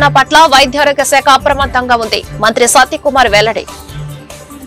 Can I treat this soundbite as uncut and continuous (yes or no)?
yes